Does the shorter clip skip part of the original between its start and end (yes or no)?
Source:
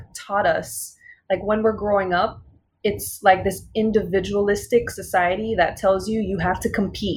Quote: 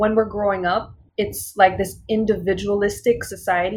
yes